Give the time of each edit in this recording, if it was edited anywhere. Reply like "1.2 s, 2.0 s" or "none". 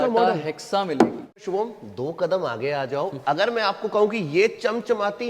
1.4 s